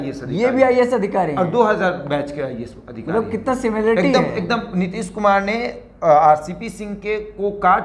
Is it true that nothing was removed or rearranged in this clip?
yes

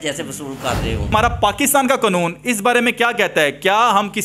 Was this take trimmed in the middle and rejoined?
yes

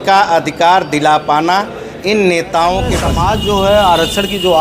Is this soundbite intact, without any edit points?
no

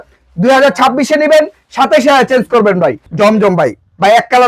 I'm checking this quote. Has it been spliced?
yes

